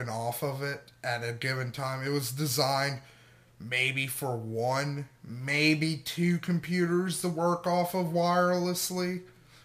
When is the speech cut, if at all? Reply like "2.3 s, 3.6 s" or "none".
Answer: 1.9 s